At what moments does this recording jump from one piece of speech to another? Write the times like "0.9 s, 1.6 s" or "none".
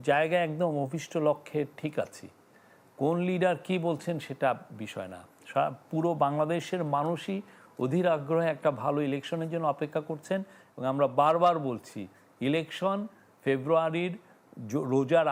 none